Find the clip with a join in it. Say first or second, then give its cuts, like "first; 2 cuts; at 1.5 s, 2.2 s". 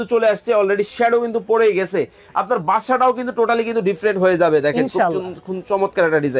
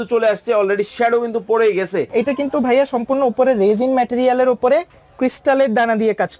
second; 1 cut; at 2.1 s